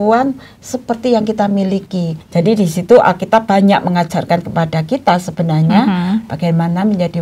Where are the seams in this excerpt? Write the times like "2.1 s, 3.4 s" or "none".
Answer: 2.1 s